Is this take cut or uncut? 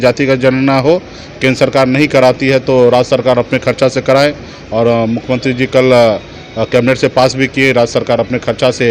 uncut